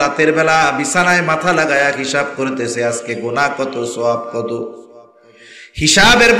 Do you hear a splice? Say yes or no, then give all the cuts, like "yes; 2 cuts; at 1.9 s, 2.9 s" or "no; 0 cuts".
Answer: no; 0 cuts